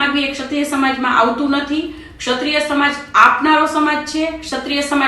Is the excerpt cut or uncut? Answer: uncut